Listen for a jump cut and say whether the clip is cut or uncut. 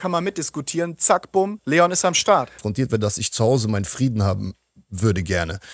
cut